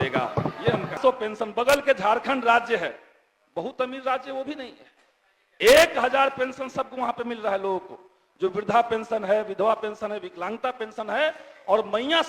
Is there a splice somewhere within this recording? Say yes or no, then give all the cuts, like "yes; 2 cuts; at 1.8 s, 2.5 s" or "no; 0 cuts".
yes; 1 cut; at 1.0 s